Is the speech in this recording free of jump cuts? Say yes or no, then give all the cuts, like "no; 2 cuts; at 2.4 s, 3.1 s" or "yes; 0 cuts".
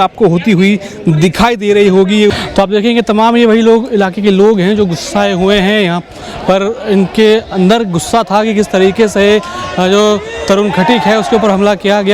no; 1 cut; at 2.3 s